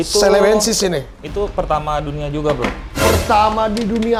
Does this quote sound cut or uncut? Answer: uncut